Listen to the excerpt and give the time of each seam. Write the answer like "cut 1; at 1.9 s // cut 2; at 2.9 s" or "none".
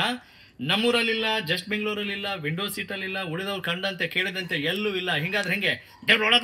none

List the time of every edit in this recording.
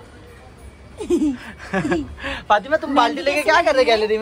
none

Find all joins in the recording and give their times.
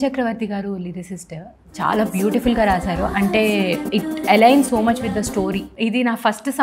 cut 1; at 5.7 s

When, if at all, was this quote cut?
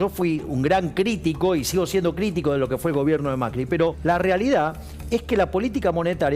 cut 1; at 4.0 s

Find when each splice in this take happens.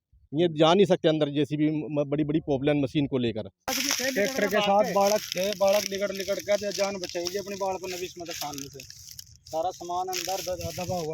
cut 1; at 3.7 s

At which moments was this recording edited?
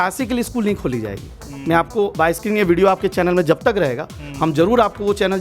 none

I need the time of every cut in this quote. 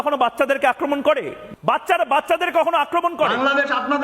cut 1; at 1.4 s

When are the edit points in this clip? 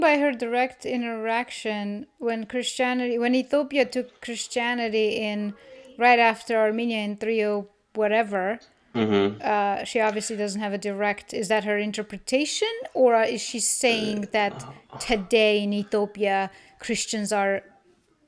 none

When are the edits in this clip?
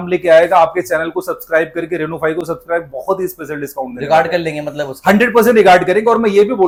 none

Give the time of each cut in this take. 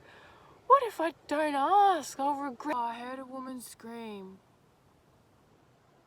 cut 1; at 2.7 s

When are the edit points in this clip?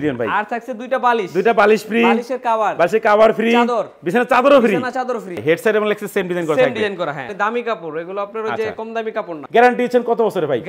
cut 1; at 5.4 s // cut 2; at 7.3 s // cut 3; at 9.4 s

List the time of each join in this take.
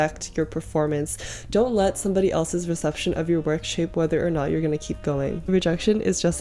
cut 1; at 5.5 s

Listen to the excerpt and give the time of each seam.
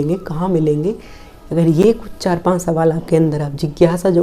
none

